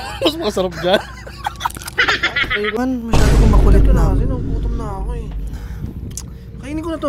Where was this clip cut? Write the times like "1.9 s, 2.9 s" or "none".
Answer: 2.8 s